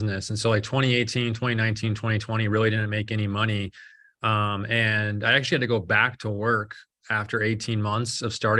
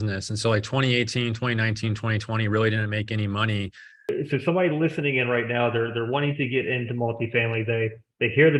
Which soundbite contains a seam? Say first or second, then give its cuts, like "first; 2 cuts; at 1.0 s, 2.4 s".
second; 1 cut; at 4.1 s